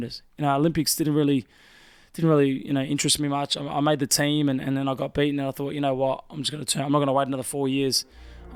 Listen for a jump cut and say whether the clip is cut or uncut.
uncut